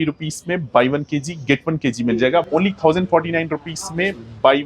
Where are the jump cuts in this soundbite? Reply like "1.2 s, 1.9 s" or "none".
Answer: 2.4 s